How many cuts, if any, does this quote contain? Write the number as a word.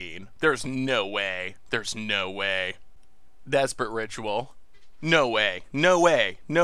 zero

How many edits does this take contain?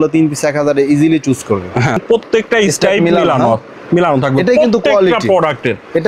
one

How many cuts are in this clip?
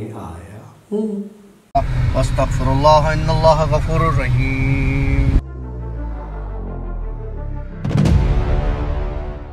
one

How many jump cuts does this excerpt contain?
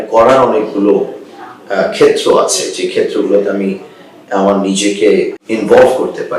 one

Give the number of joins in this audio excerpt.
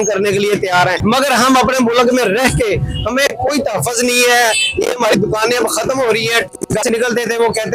two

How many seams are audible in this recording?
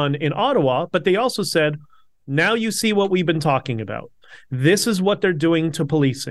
zero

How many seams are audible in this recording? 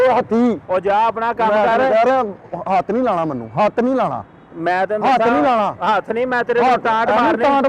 one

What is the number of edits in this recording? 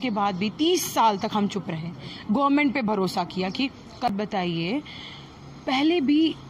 one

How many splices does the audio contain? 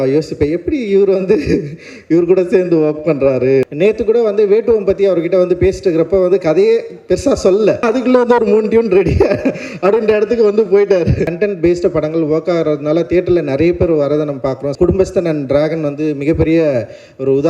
four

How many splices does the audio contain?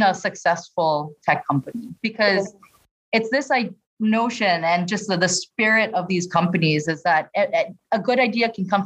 one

